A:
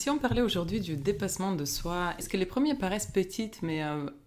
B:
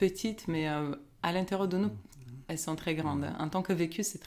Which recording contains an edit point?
A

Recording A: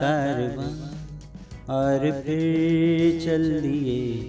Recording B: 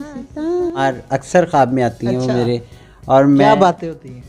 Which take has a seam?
B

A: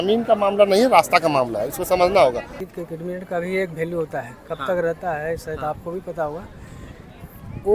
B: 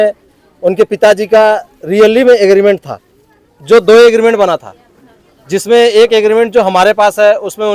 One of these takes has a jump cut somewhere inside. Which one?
A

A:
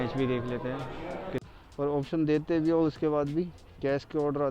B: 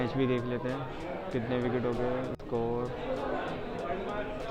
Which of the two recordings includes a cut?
A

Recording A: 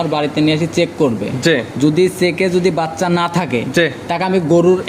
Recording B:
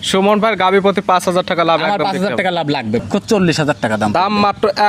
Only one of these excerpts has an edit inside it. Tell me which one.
B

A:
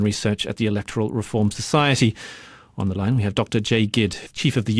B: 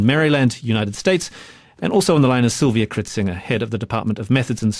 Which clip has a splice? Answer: B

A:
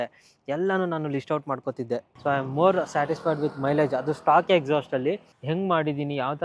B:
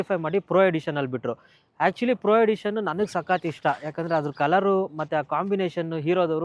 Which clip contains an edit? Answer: A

